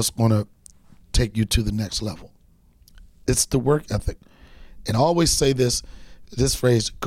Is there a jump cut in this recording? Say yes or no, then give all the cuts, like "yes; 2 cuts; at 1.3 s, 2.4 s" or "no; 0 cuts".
no; 0 cuts